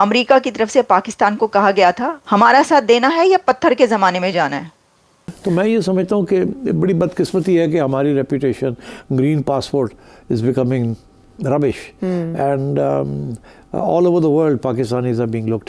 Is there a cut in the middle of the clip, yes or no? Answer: yes